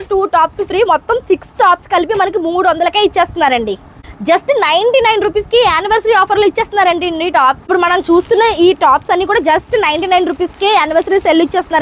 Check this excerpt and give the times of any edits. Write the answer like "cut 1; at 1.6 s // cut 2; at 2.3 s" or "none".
cut 1; at 4.1 s // cut 2; at 7.6 s

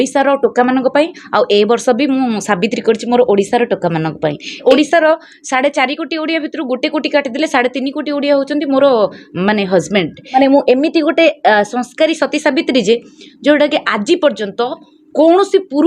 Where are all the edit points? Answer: cut 1; at 4.6 s // cut 2; at 10.3 s

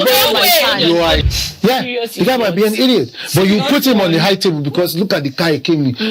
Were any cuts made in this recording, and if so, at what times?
cut 1; at 1.2 s

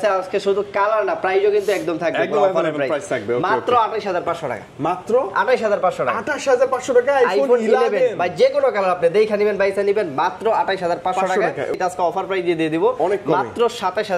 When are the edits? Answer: cut 1; at 11.8 s

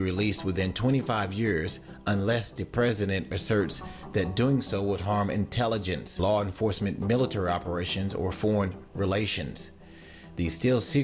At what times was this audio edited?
cut 1; at 8.2 s

